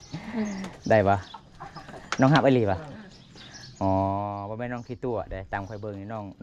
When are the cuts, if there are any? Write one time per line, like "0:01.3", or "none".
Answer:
none